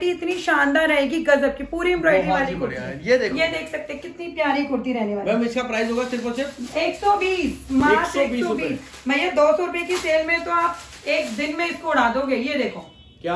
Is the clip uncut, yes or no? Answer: yes